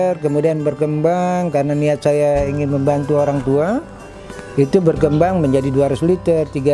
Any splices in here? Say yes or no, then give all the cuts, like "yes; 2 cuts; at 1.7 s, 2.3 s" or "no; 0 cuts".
no; 0 cuts